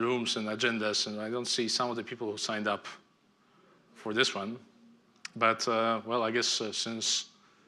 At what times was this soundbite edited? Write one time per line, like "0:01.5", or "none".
none